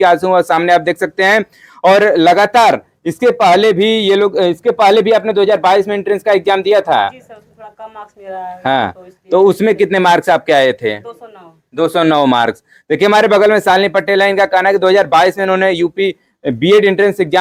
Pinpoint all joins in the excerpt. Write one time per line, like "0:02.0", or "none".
none